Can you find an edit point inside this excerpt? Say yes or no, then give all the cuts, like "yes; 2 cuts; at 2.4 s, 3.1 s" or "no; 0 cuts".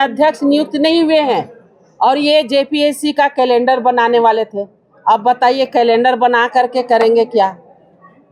no; 0 cuts